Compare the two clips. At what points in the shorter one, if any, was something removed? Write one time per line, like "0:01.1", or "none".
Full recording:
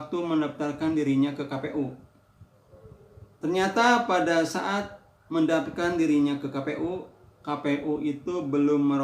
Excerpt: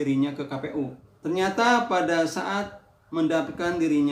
0:01.1